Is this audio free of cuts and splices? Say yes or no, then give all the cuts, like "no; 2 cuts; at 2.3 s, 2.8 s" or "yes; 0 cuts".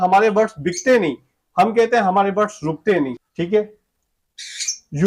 no; 1 cut; at 3.3 s